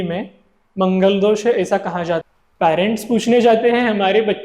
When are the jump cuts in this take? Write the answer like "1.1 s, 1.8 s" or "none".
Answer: 2.3 s